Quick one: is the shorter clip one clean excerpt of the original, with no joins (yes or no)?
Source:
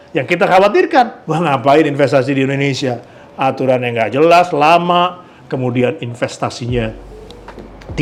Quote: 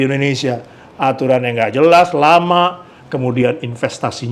yes